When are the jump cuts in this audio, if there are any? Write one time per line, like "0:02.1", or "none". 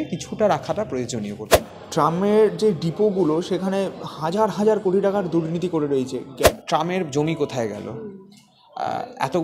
0:01.5
0:06.5